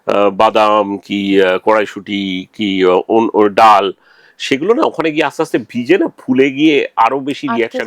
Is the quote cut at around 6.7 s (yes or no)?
no